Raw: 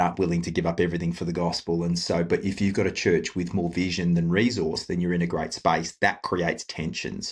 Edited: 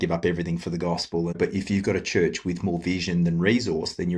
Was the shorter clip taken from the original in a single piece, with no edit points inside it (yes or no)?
no